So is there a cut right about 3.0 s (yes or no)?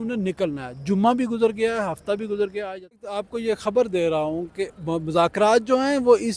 yes